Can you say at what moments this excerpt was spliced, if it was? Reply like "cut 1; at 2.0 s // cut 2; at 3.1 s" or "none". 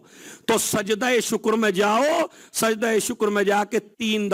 none